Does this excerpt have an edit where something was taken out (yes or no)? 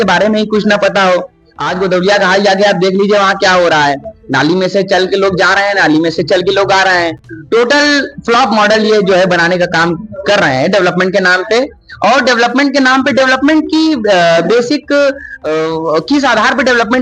no